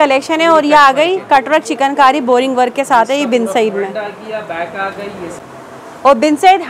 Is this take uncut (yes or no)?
no